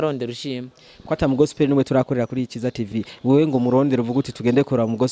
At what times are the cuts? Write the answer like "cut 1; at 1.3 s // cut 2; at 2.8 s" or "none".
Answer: none